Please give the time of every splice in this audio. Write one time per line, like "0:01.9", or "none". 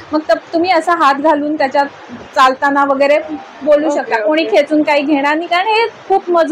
none